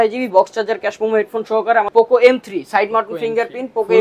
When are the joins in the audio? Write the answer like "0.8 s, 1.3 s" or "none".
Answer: 1.9 s